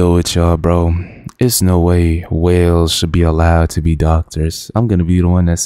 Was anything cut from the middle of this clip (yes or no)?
no